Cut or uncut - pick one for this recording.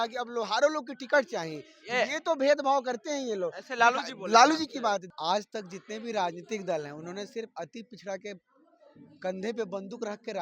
cut